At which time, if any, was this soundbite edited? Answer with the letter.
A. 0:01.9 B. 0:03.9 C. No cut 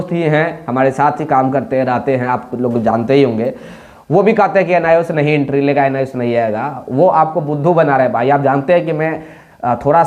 C